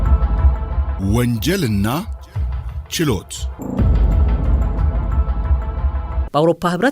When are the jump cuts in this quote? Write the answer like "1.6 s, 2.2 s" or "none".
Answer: 0.9 s, 3.5 s, 6.2 s